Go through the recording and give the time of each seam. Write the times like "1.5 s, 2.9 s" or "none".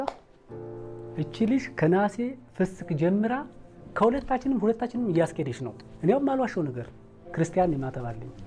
none